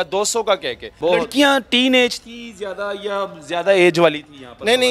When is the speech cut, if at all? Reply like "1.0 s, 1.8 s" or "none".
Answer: 0.9 s